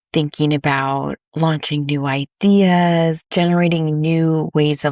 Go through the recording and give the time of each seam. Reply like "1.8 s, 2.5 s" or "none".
3.2 s